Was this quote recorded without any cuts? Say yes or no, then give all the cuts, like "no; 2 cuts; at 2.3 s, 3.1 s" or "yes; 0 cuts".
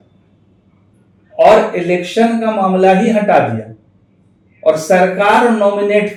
yes; 0 cuts